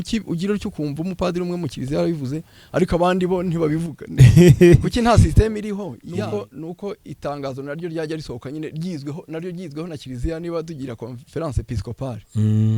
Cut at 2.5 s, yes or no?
no